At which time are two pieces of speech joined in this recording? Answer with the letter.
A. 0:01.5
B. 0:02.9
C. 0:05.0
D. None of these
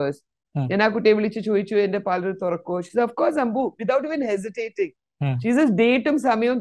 D